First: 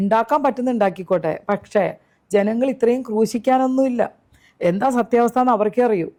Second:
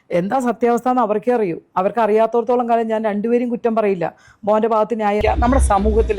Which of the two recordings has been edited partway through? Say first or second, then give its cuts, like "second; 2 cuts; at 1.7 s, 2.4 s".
second; 1 cut; at 5.2 s